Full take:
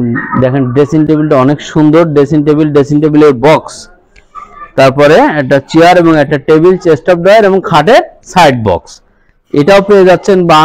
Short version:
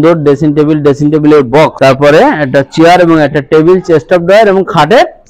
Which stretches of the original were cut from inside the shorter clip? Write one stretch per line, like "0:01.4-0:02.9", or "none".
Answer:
0:03.6-0:04.7